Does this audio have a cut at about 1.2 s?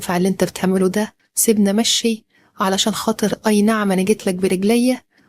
yes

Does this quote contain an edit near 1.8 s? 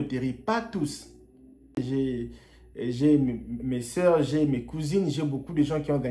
yes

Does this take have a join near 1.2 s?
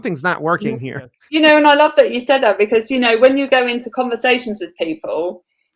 yes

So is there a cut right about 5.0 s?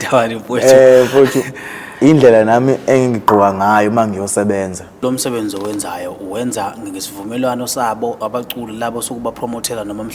yes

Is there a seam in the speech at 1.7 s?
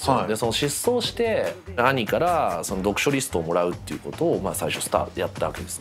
yes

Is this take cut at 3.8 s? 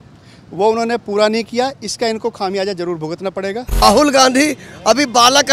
yes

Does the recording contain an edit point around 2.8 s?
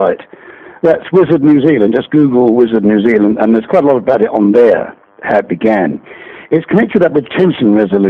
yes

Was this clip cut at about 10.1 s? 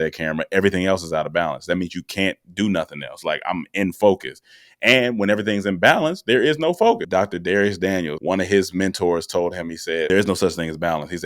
yes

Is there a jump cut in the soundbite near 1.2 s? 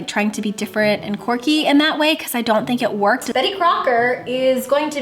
no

